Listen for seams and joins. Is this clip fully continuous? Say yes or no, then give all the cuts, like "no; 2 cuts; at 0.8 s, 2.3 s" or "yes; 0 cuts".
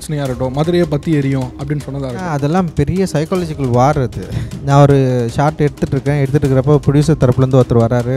no; 2 cuts; at 2.3 s, 4.5 s